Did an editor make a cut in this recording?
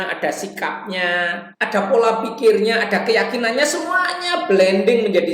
yes; 1 cut; at 1.5 s

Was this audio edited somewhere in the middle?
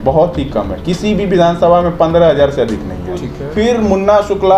yes; 1 cut; at 3.4 s

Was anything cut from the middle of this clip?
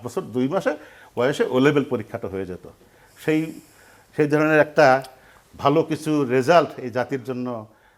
no; 0 cuts

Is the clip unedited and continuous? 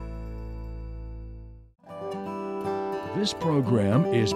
no; 2 cuts; at 2.0 s, 3.2 s

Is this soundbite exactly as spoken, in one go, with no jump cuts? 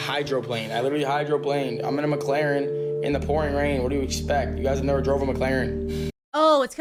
yes; 0 cuts

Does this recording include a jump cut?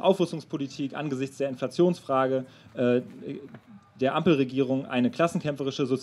no; 0 cuts

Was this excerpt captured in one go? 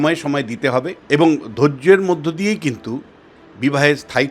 no; 1 cut; at 1.0 s

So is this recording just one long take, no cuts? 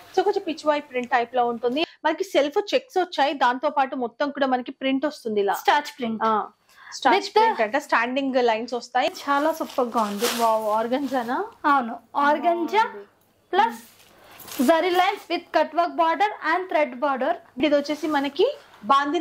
no; 3 cuts; at 1.8 s, 9.1 s, 17.6 s

